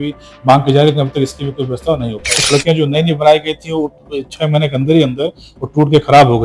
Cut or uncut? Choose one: cut